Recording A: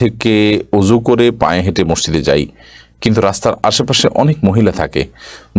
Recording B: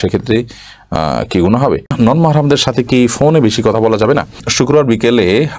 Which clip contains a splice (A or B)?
B